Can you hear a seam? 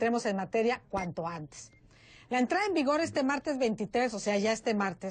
no; 0 cuts

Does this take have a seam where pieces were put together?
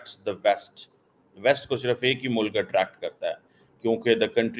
no; 0 cuts

